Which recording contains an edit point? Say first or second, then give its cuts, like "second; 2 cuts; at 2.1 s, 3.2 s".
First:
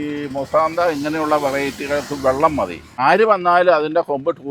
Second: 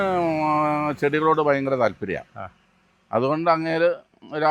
first; 1 cut; at 3.0 s